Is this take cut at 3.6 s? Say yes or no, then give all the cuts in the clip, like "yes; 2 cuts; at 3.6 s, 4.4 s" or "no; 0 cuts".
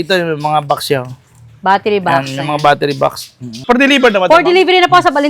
yes; 1 cut; at 3.6 s